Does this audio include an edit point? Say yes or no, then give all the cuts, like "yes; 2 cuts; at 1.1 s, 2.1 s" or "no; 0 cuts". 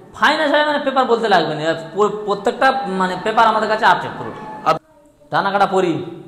yes; 1 cut; at 4.8 s